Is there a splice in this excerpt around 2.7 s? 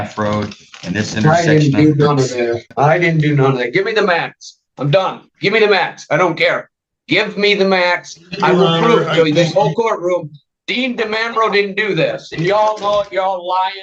yes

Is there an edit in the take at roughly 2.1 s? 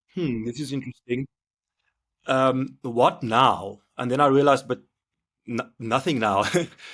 no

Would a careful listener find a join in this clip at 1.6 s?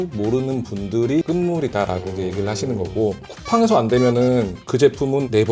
no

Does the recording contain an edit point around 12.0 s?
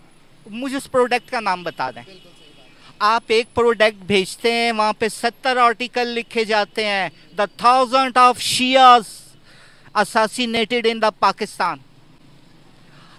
no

